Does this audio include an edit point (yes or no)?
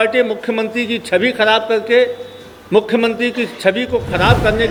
no